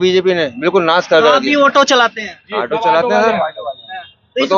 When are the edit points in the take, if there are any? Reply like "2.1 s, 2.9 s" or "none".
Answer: none